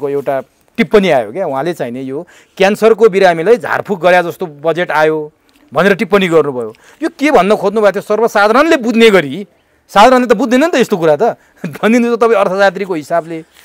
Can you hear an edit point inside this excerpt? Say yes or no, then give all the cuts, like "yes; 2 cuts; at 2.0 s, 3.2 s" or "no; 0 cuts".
no; 0 cuts